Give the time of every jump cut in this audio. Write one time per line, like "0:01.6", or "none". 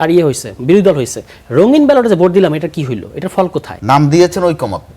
0:03.7